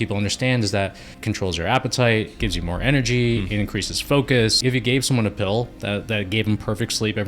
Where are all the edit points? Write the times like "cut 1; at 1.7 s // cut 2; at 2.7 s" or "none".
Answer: cut 1; at 1.1 s // cut 2; at 4.6 s